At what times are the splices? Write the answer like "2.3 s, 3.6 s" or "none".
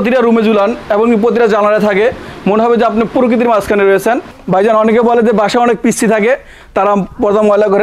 4.3 s